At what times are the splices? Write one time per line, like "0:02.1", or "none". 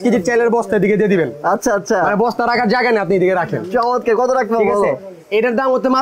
none